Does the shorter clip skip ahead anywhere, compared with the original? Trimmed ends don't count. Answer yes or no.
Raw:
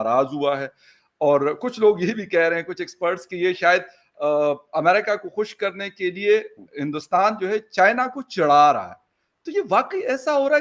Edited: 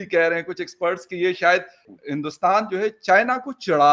yes